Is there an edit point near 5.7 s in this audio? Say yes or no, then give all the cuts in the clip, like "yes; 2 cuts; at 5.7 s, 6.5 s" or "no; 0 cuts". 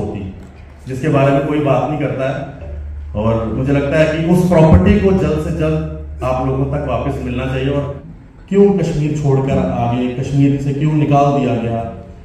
no; 1 cut; at 8.0 s